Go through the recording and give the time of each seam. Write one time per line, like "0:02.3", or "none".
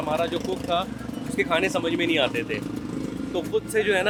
none